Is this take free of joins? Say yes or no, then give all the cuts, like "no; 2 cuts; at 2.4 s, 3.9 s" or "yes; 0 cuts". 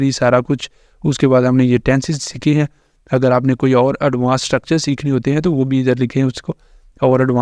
yes; 0 cuts